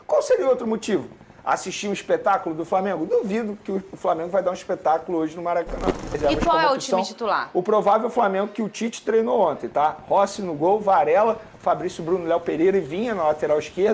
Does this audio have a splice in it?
yes; 1 cut; at 6.2 s

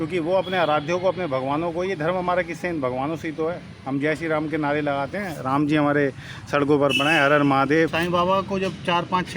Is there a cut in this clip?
yes; 1 cut; at 8.0 s

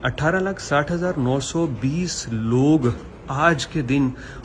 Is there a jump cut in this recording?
no; 0 cuts

